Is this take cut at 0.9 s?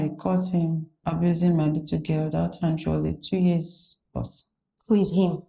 yes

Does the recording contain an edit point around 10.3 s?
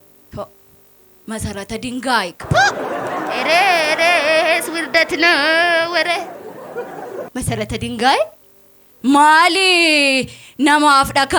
no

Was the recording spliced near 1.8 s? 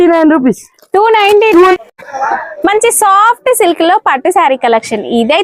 yes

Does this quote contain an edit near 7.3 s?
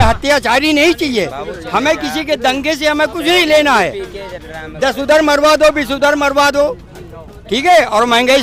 no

